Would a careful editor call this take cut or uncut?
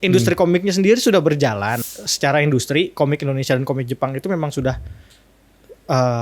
cut